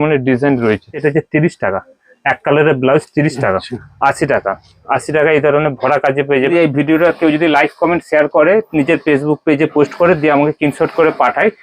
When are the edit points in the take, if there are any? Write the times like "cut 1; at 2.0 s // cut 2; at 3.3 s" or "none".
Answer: cut 1; at 1.0 s // cut 2; at 3.8 s // cut 3; at 6.4 s